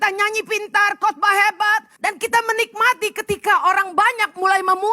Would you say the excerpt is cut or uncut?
cut